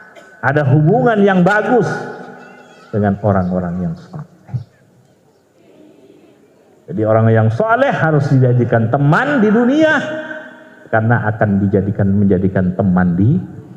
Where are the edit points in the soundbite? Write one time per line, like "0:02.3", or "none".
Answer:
0:05.6